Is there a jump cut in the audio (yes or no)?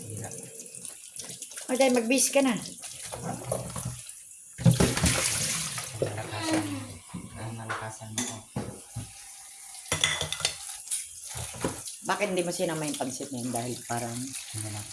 no